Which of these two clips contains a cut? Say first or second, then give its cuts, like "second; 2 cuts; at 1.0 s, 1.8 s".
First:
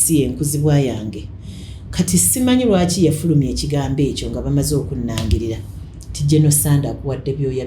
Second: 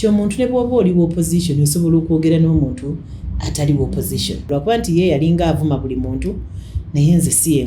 second; 1 cut; at 4.4 s